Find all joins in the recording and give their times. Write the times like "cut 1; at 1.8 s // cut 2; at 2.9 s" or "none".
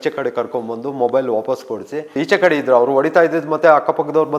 cut 1; at 2.2 s